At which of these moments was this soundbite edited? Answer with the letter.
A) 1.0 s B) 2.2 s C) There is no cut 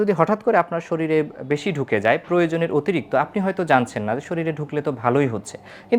C